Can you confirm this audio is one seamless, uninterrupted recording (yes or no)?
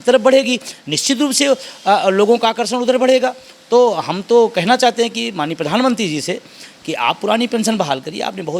yes